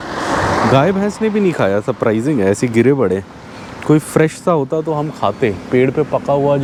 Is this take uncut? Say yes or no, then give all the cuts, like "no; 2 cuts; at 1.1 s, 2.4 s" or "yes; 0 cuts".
yes; 0 cuts